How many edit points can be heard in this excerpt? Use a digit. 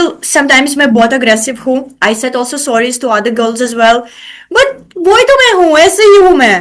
0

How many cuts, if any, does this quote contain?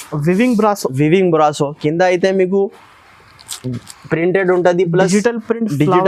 0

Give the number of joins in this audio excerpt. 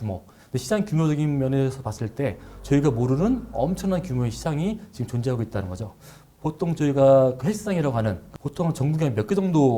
2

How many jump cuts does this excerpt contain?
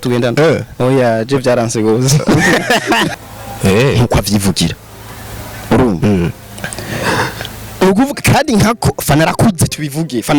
1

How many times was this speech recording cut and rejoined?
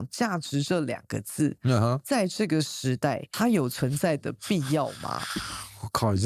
1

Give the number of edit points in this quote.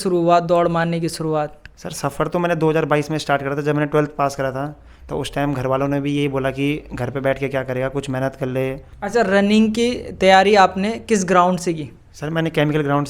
1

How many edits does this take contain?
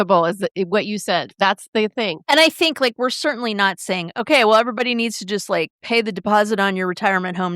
2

